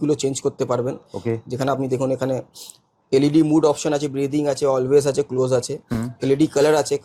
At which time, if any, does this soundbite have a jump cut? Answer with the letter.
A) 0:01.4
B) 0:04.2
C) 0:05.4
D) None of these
D